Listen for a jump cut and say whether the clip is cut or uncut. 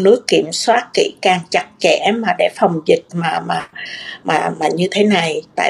uncut